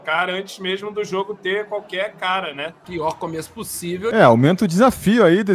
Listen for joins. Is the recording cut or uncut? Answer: cut